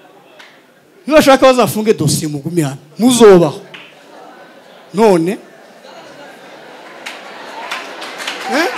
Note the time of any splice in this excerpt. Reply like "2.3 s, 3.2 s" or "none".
none